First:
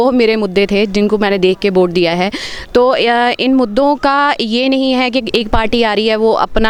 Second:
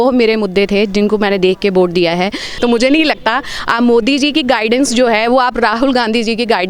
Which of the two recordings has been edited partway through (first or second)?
second